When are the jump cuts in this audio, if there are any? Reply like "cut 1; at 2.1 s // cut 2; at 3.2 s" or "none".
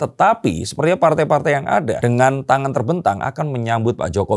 none